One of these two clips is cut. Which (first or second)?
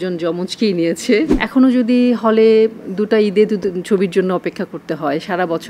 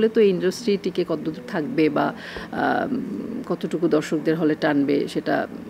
first